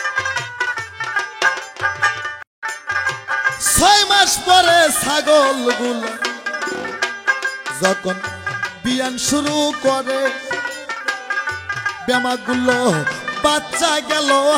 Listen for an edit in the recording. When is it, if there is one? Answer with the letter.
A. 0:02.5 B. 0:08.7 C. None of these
A